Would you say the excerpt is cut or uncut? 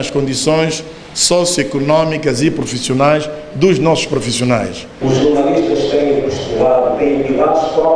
cut